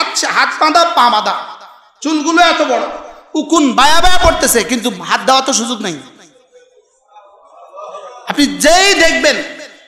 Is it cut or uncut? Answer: uncut